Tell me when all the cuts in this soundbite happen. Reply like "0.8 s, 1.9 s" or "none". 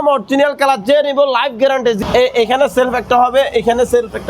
2.0 s